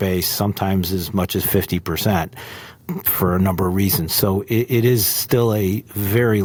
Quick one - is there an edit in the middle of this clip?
no; 0 cuts

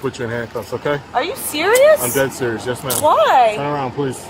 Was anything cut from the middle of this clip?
yes; 1 cut; at 3.4 s

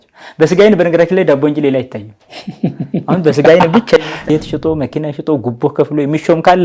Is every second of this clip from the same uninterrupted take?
no; 1 cut; at 4.0 s

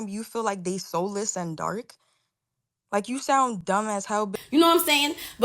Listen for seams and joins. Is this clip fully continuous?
no; 1 cut; at 4.3 s

